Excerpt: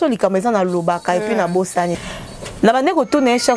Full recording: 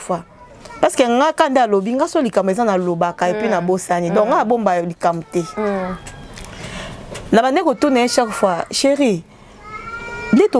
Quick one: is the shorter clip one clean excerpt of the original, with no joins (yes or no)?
no